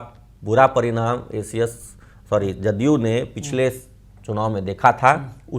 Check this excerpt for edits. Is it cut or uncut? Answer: uncut